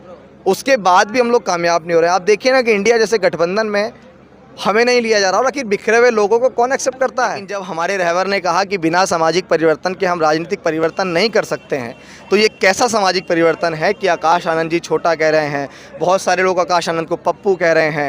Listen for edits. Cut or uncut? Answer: cut